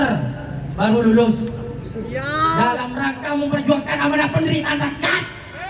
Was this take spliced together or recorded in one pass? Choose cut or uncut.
uncut